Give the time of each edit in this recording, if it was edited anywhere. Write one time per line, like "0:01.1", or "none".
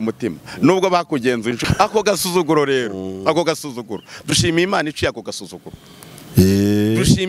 0:01.6